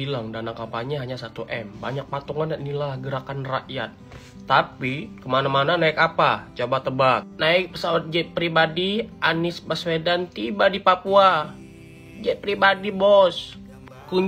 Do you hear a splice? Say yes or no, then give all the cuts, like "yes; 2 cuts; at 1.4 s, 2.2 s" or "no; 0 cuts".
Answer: no; 0 cuts